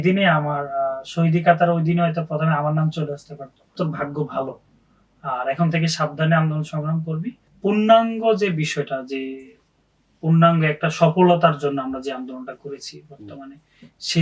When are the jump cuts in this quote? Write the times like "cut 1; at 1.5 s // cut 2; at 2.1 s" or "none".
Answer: cut 1; at 3.8 s // cut 2; at 7.4 s